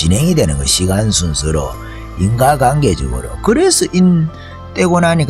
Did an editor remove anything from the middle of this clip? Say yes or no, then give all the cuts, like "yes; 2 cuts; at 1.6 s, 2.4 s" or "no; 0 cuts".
no; 0 cuts